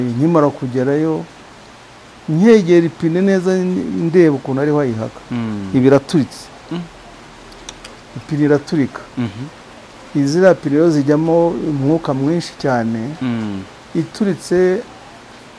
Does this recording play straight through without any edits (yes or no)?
yes